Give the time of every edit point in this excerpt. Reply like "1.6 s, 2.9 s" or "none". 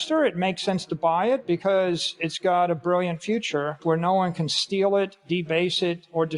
3.8 s